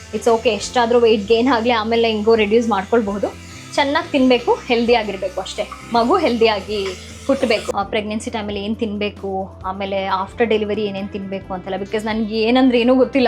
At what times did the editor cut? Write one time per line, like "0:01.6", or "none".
0:07.7